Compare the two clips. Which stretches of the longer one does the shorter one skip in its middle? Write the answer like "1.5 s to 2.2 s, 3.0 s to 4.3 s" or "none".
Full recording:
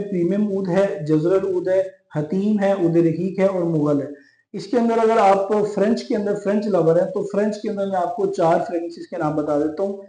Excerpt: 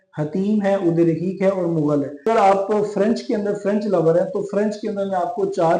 4.2 s to 5.1 s